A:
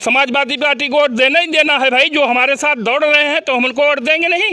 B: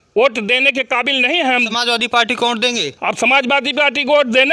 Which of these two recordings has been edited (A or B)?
B